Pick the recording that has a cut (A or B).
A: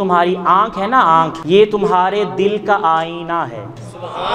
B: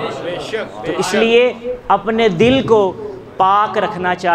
A